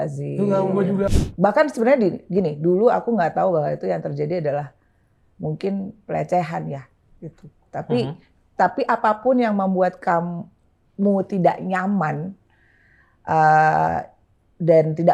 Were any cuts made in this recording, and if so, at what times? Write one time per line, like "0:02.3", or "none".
0:01.1